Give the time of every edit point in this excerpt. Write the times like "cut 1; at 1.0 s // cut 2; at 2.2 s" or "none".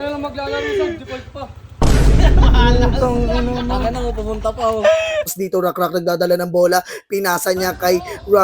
cut 1; at 5.4 s